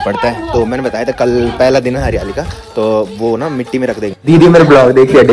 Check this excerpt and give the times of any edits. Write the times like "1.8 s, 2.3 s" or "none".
4.2 s